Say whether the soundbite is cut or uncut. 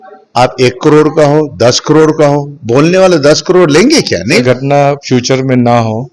cut